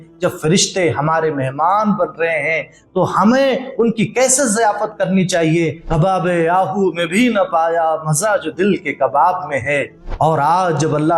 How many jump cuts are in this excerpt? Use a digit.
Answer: 2